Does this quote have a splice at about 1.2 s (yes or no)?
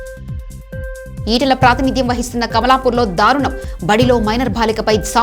no